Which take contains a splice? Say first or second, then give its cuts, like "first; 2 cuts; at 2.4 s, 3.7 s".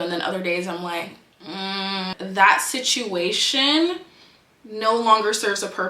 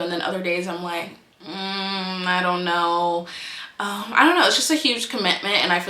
first; 1 cut; at 2.1 s